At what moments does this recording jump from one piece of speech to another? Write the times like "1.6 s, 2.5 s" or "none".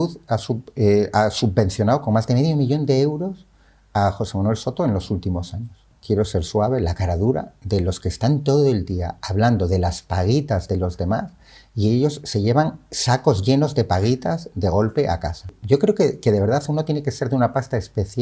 5.9 s, 15.4 s